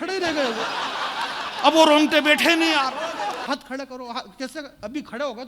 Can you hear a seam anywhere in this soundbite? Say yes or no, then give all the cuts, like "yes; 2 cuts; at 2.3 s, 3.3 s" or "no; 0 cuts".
yes; 1 cut; at 3.4 s